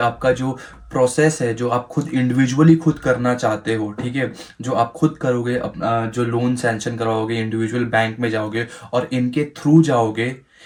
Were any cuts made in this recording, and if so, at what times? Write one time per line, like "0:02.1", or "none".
none